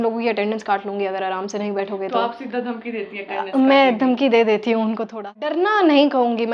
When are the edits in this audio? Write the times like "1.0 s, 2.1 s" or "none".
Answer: 5.6 s